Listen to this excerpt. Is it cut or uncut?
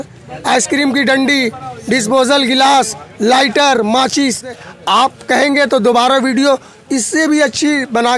cut